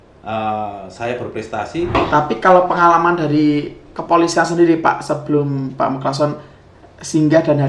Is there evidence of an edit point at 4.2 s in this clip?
no; 1 cut; at 1.9 s

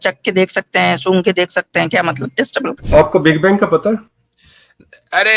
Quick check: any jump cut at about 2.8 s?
yes; 1 cut; at 2.8 s

